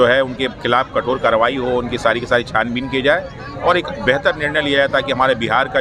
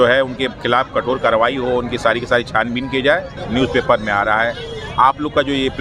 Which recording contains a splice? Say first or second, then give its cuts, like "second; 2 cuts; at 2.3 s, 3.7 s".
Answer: second; 1 cut; at 3.4 s